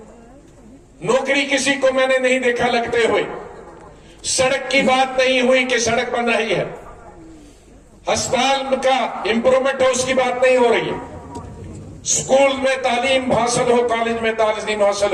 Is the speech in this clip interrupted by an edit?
no; 0 cuts

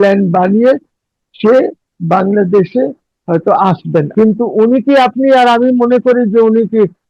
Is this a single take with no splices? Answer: no; 1 cut; at 4.1 s

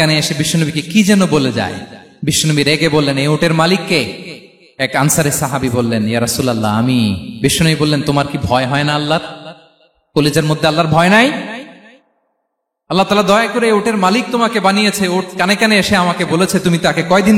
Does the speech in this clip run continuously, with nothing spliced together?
yes; 0 cuts

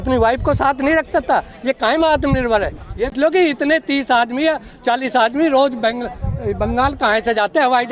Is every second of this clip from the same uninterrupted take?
no; 1 cut; at 3.1 s

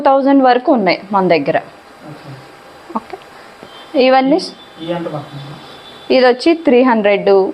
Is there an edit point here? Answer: no; 0 cuts

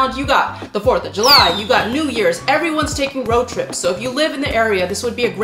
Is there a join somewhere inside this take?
no; 0 cuts

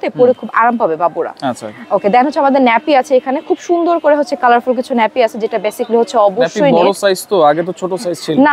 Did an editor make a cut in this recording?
no; 0 cuts

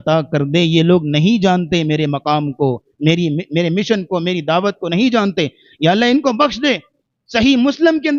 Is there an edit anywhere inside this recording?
no; 0 cuts

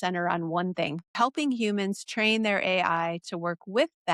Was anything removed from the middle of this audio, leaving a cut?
yes; 1 cut; at 1.1 s

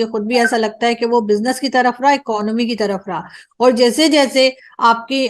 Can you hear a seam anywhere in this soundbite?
no; 0 cuts

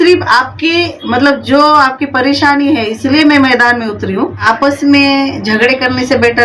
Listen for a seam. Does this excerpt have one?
yes; 1 cut; at 4.4 s

